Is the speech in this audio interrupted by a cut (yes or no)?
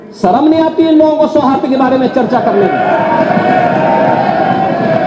no